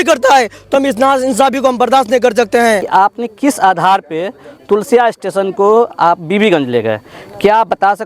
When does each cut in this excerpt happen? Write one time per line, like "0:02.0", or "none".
0:02.8